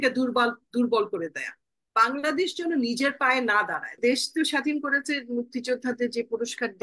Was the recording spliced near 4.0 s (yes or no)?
yes